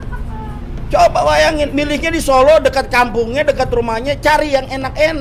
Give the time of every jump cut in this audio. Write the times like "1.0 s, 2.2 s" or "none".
none